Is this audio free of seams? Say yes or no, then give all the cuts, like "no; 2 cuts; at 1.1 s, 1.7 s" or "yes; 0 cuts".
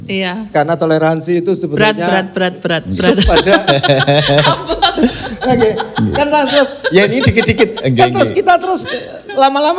yes; 0 cuts